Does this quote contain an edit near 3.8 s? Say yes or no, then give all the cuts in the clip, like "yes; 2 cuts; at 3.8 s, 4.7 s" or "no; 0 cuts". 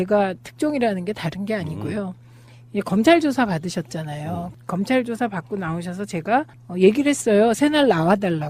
yes; 1 cut; at 3.8 s